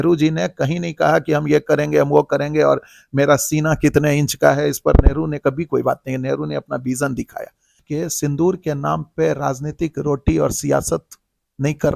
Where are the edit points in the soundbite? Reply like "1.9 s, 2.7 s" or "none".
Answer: 7.8 s

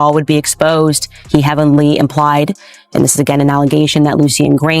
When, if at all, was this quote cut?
1.1 s

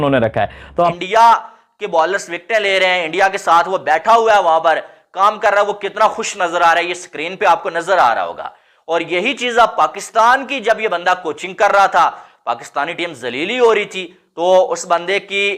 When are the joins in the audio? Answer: 0.9 s

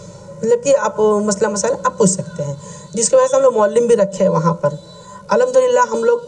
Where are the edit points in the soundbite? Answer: none

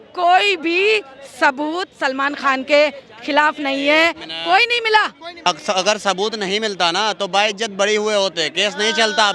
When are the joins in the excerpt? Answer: 5.4 s

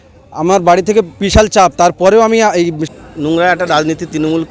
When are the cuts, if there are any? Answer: 2.9 s

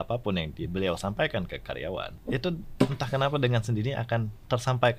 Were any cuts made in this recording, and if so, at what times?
2.1 s

